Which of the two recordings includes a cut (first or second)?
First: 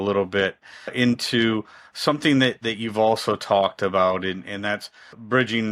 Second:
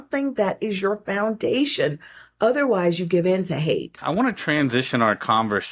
second